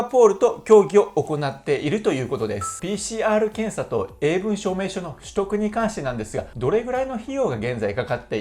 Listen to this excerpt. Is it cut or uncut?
cut